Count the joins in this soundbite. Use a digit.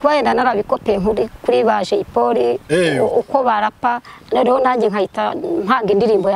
0